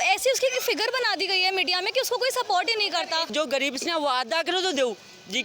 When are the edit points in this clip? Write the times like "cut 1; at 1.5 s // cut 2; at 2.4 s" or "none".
cut 1; at 3.3 s